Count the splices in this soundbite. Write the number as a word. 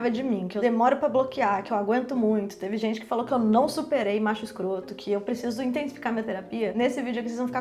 zero